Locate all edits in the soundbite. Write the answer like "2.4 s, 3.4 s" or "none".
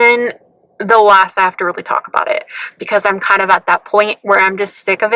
none